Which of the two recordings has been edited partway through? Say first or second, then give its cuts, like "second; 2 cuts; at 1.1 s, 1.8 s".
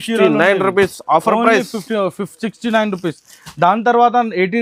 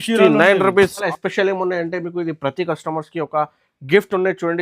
second; 1 cut; at 1.0 s